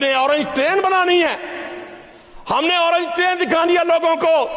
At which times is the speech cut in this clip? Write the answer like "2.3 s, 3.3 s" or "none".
none